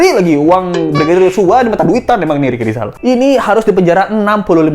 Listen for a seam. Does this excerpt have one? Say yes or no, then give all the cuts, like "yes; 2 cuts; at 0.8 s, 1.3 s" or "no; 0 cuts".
yes; 1 cut; at 2.9 s